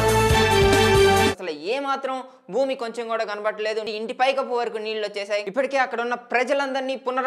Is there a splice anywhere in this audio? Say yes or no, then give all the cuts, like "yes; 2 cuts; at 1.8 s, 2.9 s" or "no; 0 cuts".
no; 0 cuts